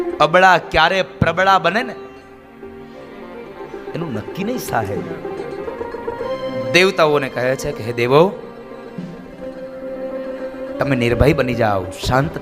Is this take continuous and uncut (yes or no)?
no